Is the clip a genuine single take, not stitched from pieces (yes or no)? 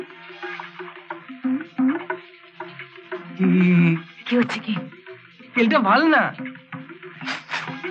yes